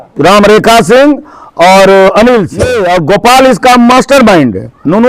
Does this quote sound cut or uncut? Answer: cut